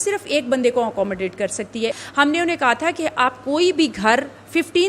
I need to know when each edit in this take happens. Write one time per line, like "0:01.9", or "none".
0:02.0